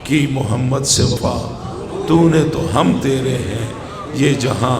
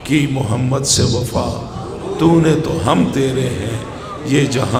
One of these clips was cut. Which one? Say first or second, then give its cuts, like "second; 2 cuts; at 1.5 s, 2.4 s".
first; 1 cut; at 1.1 s